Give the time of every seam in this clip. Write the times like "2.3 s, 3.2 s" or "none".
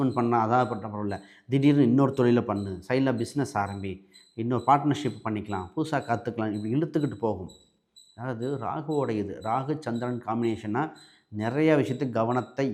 none